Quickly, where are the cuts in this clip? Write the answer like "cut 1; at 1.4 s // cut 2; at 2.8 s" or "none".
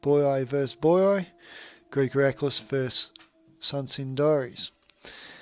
cut 1; at 2.5 s